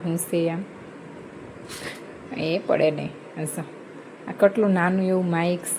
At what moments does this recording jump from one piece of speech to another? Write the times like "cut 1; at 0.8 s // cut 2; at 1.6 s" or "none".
none